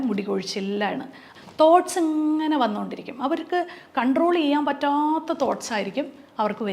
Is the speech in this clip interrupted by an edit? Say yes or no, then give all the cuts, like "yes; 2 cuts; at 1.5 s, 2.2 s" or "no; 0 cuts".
yes; 1 cut; at 1.2 s